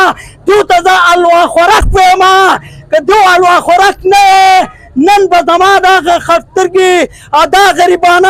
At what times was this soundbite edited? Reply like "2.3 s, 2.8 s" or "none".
none